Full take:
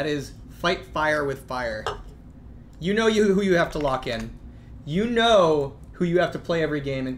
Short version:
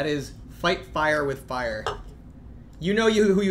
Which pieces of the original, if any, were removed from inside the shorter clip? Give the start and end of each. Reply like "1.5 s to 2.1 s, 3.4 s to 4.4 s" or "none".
none